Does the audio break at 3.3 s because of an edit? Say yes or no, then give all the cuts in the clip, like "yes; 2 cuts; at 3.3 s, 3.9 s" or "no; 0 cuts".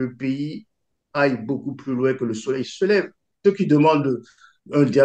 yes; 1 cut; at 3.3 s